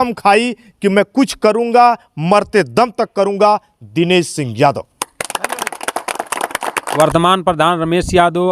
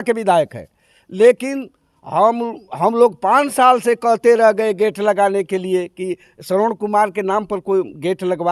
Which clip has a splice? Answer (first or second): first